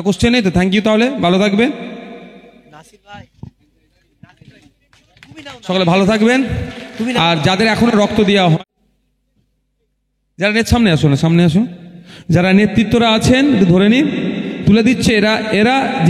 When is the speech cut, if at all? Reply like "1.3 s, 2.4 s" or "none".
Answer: 8.7 s